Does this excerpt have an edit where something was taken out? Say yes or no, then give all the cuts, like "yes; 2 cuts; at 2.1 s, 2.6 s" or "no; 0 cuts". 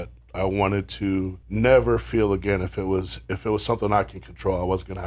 yes; 1 cut; at 1.4 s